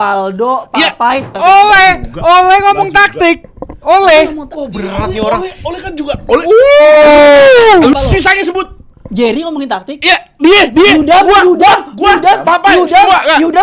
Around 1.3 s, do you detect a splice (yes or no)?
yes